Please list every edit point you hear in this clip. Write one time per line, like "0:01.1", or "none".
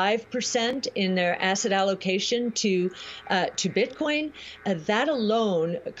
none